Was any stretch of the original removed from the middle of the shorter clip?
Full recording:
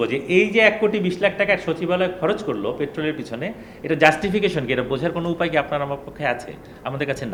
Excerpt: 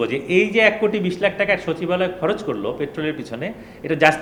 no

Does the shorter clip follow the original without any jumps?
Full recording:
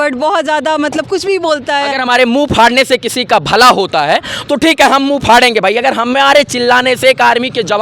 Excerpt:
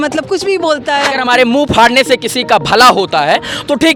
yes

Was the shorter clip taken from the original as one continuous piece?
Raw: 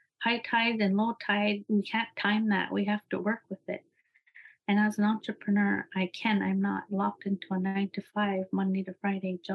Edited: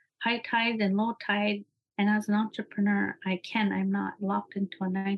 no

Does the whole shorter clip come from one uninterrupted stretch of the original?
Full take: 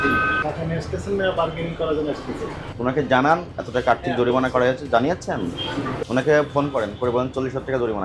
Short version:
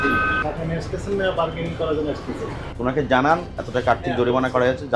yes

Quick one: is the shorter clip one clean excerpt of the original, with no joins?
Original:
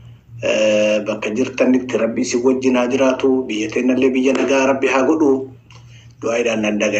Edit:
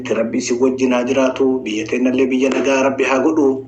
yes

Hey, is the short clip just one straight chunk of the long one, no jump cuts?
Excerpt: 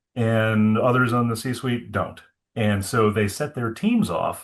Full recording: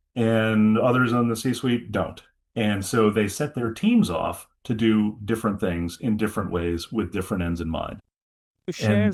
yes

